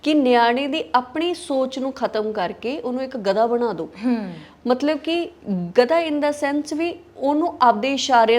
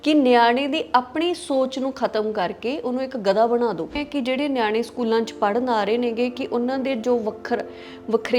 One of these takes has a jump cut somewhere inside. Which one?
second; 1 cut; at 4.0 s

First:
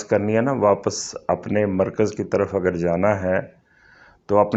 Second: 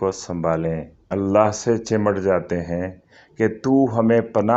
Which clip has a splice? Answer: second; 1 cut; at 1.0 s

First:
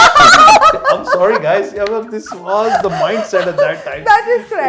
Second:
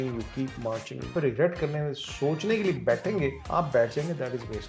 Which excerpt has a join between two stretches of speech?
second; 2 cuts; at 1.1 s, 3.4 s

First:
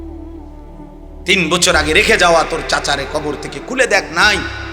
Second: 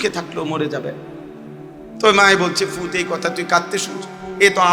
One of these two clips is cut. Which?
first; 1 cut; at 1.2 s

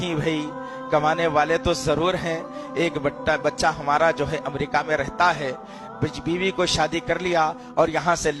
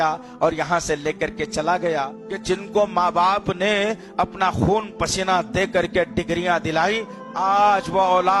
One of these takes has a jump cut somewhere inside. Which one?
second; 2 cuts; at 2.2 s, 7.2 s

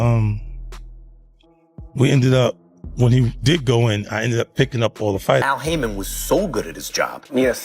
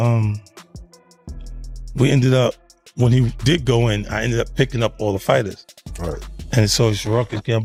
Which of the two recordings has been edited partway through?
first; 1 cut; at 5.5 s

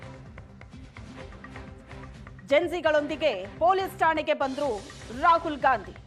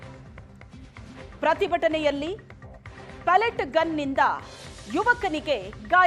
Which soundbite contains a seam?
second; 1 cut; at 1.4 s

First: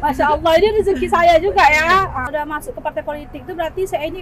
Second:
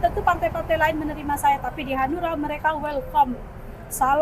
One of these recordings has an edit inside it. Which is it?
first; 1 cut; at 2.3 s

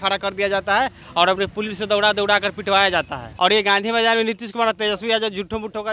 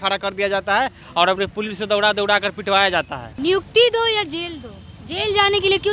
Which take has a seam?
first; 1 cut; at 3.2 s

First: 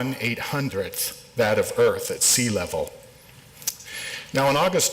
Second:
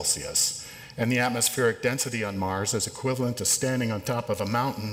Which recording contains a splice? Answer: first; 1 cut; at 2.2 s

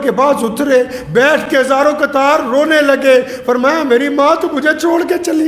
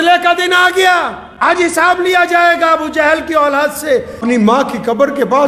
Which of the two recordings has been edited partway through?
second; 2 cuts; at 1.2 s, 4.2 s

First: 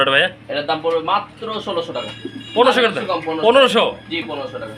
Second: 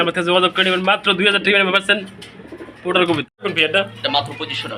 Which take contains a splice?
second; 1 cut; at 3.4 s

